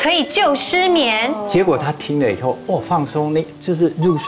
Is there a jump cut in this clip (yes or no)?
no